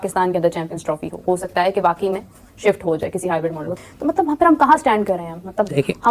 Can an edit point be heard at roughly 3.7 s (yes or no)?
yes